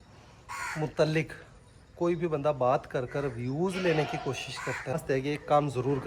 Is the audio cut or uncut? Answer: cut